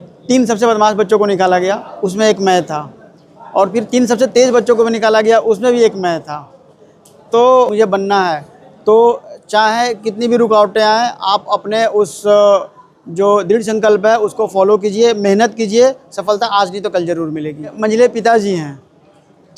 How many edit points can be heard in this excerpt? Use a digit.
2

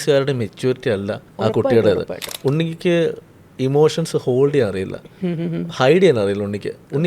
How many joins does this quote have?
2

